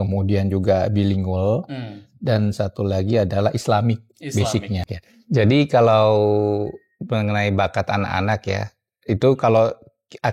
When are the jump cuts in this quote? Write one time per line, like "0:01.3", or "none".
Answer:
0:04.9